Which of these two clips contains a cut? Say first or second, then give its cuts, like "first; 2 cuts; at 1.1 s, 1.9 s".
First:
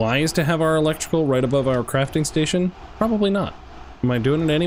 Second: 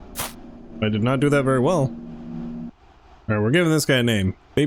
second; 1 cut; at 2.8 s